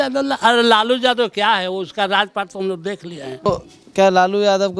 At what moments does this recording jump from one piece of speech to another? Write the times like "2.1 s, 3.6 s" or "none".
3.5 s